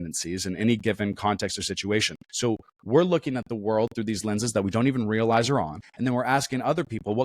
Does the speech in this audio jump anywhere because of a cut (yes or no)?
yes